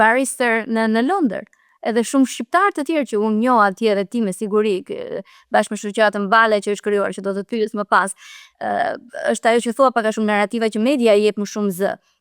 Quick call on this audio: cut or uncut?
uncut